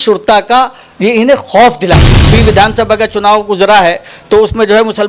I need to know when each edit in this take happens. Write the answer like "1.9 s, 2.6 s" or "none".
2.3 s